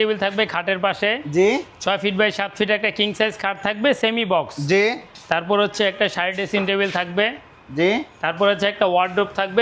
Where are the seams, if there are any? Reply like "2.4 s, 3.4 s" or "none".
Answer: none